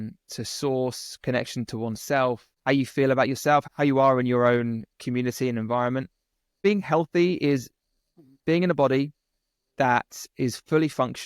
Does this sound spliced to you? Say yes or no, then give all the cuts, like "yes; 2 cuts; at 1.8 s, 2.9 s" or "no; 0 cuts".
yes; 3 cuts; at 2.5 s, 3.7 s, 6.6 s